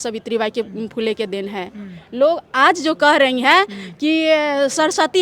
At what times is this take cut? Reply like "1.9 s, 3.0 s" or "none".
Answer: none